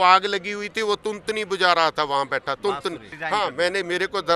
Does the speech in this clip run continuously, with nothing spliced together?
no; 1 cut; at 3.1 s

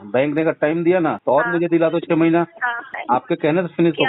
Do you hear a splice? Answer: yes; 2 cuts; at 1.2 s, 2.9 s

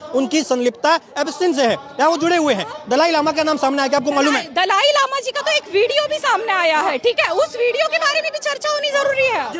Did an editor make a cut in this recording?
no; 0 cuts

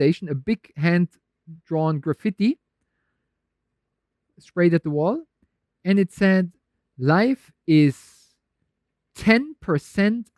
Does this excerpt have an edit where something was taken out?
no; 0 cuts

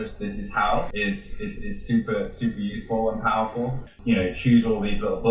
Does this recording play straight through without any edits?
no; 1 cut; at 3.9 s

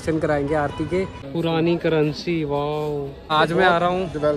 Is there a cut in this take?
yes; 2 cuts; at 1.2 s, 3.2 s

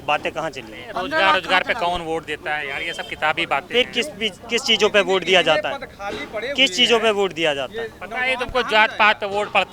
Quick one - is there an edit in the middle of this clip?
no; 0 cuts

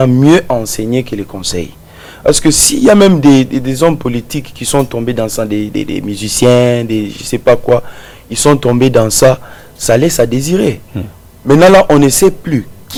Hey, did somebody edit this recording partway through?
no; 0 cuts

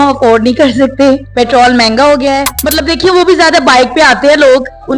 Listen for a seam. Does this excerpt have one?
yes; 2 cuts; at 1.3 s, 2.6 s

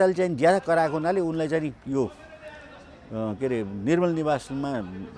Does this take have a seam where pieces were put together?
no; 0 cuts

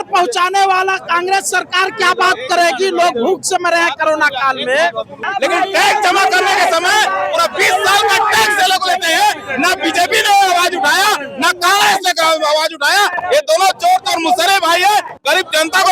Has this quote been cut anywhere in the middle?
yes; 1 cut; at 5.2 s

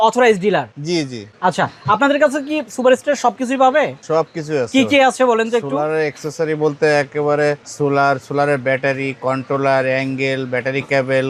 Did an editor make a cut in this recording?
no; 0 cuts

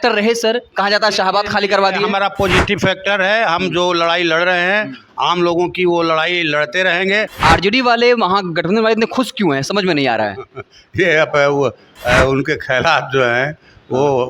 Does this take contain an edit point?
yes; 1 cut; at 7.3 s

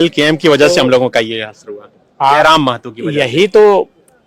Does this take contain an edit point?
no; 0 cuts

